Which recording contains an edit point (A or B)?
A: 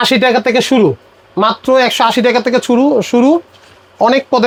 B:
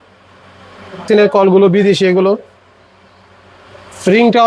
B